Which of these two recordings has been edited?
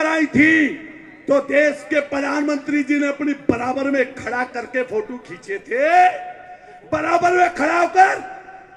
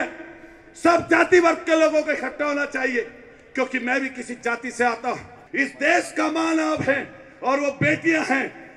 second; 1 cut; at 5.4 s

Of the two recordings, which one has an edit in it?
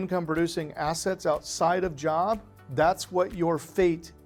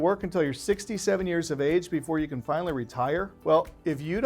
second; 1 cut; at 3.3 s

